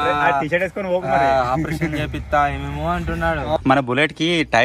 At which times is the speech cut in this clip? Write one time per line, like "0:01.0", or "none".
0:03.6